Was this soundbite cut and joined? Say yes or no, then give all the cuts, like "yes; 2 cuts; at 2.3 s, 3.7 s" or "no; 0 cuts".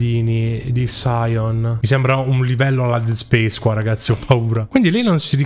yes; 2 cuts; at 1.8 s, 4.6 s